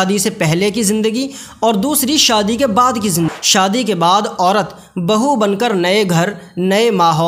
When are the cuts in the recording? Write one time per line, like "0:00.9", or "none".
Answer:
0:03.4

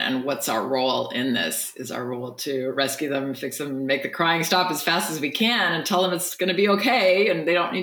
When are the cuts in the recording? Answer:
none

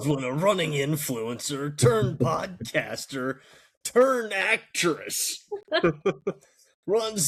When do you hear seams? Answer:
none

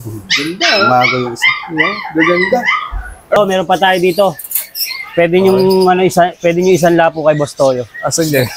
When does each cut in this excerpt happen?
0:03.4

